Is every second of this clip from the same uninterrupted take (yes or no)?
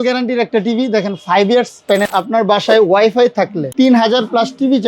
no